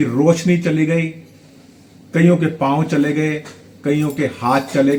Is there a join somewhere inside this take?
no; 0 cuts

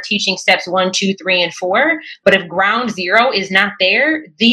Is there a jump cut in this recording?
no; 0 cuts

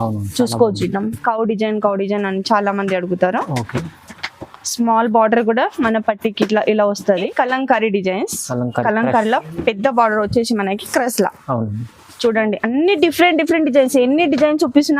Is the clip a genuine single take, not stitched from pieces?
no; 1 cut; at 7.1 s

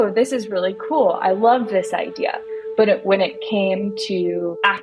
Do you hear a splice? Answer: no; 0 cuts

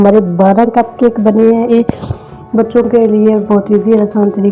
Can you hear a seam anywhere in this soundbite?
yes; 1 cut; at 1.8 s

